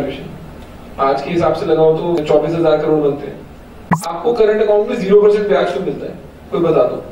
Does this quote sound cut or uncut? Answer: cut